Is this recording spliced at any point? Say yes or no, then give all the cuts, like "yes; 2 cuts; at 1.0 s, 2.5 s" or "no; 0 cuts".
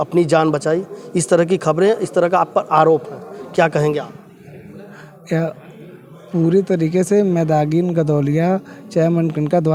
no; 0 cuts